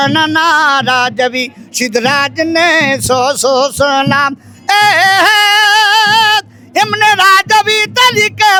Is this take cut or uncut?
uncut